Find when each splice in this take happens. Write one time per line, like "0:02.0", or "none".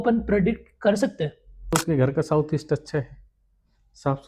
0:01.7